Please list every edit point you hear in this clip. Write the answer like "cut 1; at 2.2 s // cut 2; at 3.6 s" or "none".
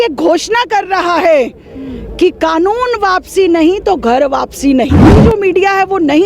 cut 1; at 5.2 s